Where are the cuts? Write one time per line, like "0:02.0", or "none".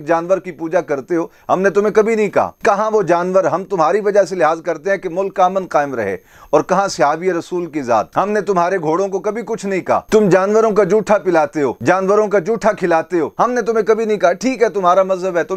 none